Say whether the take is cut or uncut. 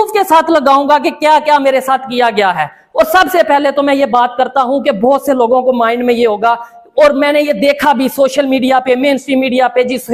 uncut